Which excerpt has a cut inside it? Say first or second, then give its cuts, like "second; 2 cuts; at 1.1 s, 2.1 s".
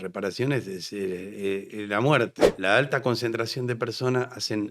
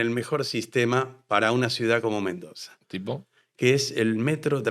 first; 1 cut; at 2.5 s